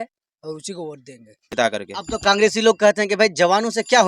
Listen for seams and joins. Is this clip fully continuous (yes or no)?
no